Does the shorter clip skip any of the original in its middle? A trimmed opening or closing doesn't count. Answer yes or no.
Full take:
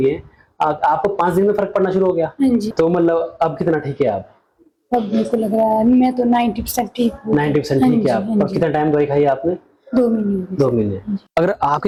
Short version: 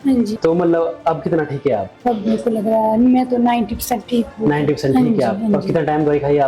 yes